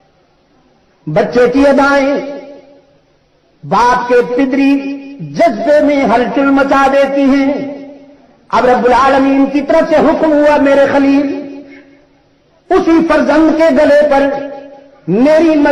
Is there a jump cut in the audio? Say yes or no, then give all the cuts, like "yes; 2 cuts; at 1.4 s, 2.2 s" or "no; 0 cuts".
no; 0 cuts